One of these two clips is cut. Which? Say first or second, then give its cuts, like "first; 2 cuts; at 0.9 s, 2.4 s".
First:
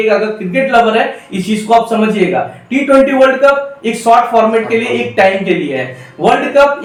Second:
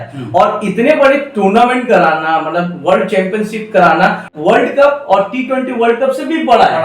second; 1 cut; at 4.3 s